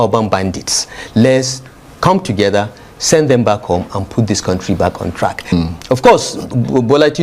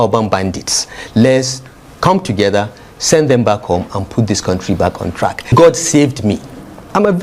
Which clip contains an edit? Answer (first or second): second